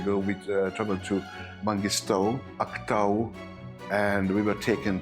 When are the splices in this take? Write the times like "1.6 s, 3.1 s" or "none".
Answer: 2.5 s